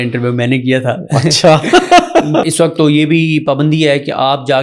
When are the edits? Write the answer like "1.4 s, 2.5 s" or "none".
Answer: 2.4 s

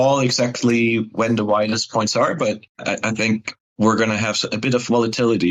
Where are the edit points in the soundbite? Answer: none

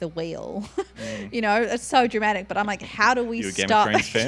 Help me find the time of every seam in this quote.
none

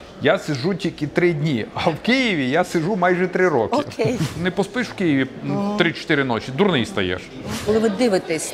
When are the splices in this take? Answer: 4.4 s, 7.6 s

